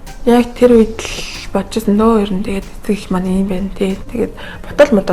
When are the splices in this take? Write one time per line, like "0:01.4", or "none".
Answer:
0:04.1